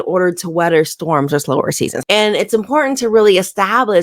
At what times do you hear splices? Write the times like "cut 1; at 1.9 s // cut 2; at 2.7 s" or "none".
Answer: cut 1; at 2.0 s